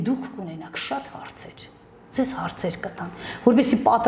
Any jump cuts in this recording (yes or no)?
no